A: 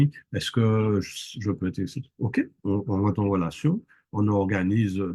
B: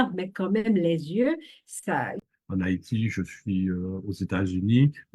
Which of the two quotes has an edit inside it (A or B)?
B